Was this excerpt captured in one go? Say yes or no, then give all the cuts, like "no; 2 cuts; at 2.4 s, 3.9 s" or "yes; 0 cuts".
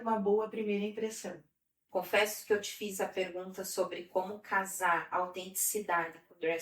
no; 1 cut; at 1.7 s